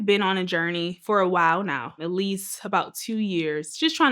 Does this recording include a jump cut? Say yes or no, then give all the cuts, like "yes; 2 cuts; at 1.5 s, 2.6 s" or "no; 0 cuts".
yes; 2 cuts; at 1.0 s, 2.0 s